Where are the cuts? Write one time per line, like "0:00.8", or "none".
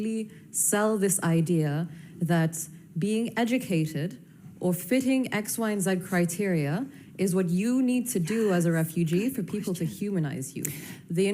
none

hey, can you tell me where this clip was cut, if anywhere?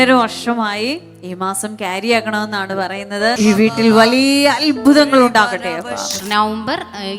0:03.4
0:06.2

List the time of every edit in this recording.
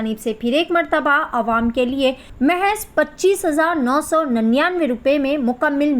0:02.3

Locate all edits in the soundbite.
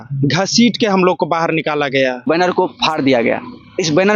0:02.3

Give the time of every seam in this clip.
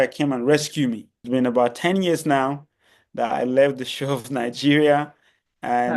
0:01.2

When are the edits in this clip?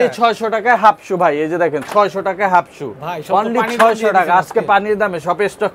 none

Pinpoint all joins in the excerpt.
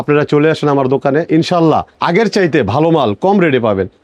0:01.9

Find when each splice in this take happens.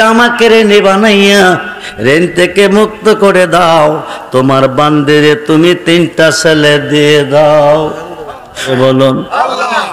0:08.7

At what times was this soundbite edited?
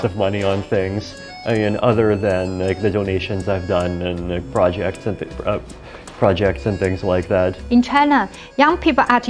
none

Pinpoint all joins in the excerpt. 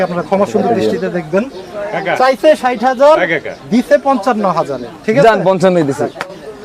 none

